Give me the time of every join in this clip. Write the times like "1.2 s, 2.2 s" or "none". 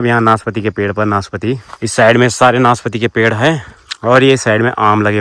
none

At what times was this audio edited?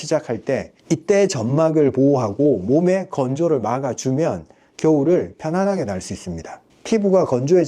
6.7 s

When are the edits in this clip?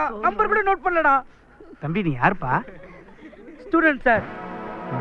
none

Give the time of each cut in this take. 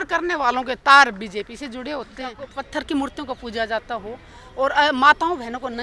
2.5 s

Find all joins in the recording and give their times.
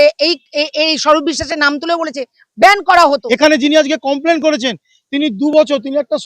3.2 s

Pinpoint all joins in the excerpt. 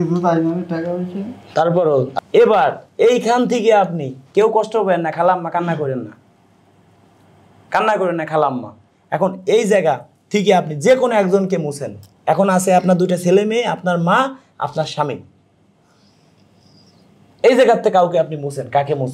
2.1 s

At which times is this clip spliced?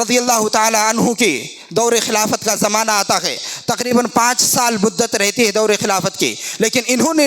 none

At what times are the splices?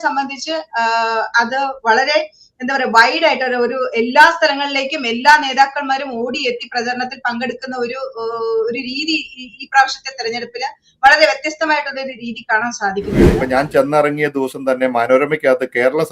13.4 s

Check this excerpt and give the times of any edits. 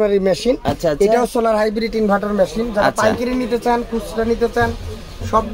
none

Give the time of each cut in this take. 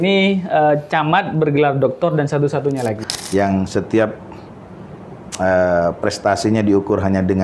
3.0 s

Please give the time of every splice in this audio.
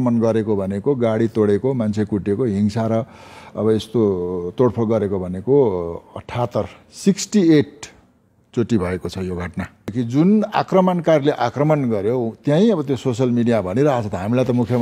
9.9 s

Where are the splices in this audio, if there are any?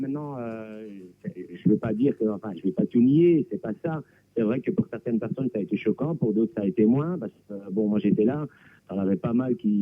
none

